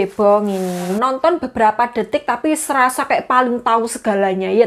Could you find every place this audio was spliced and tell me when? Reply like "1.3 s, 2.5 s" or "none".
0.9 s